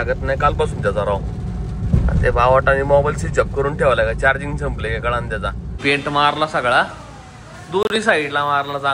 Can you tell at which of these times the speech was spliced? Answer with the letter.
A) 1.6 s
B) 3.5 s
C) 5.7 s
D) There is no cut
C